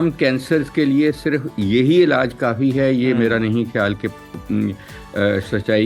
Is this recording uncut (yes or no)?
yes